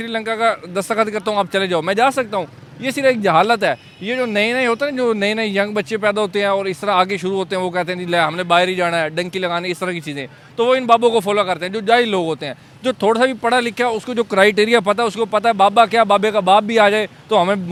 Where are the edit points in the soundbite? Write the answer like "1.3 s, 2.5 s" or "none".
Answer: none